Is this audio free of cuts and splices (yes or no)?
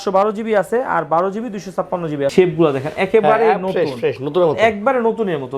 no